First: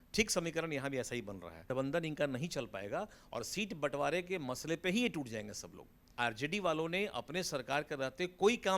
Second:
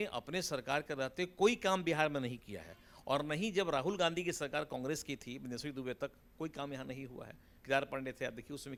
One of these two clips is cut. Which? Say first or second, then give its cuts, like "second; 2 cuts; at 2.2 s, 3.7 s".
first; 2 cuts; at 1.7 s, 6.1 s